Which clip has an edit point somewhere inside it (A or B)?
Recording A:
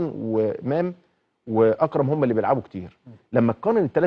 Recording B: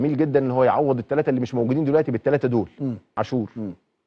B